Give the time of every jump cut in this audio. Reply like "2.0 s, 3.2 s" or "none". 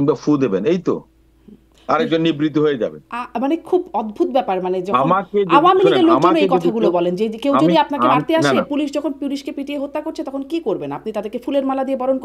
none